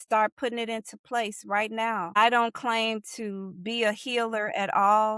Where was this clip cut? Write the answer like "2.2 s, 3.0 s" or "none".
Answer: 2.2 s